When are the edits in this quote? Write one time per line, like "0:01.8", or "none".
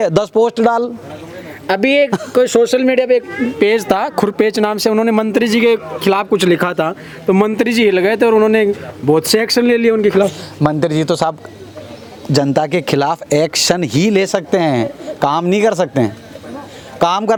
none